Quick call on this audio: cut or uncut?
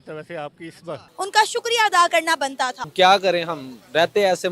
cut